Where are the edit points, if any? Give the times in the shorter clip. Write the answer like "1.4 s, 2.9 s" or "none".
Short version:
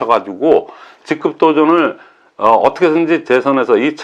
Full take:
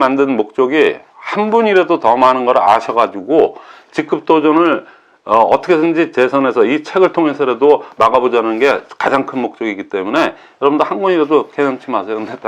none